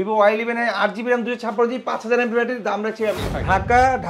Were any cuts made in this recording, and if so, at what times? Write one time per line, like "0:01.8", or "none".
0:03.2